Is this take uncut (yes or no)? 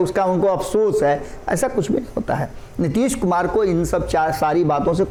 yes